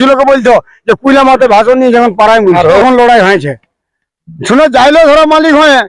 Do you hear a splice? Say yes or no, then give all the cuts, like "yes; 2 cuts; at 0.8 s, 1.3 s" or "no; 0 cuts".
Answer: yes; 1 cut; at 2.8 s